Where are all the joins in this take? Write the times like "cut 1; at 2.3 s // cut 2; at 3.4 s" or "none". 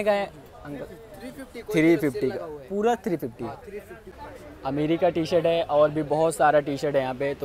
cut 1; at 4.0 s